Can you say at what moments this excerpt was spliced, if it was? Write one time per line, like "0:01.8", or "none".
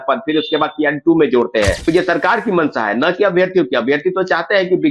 0:01.8